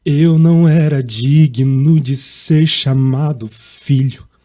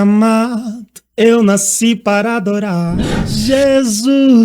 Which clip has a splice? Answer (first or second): second